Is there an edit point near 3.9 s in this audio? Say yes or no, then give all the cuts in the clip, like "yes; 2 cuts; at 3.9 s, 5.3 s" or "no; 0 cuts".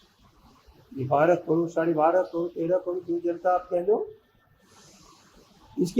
no; 0 cuts